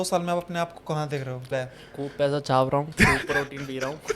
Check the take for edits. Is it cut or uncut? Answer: cut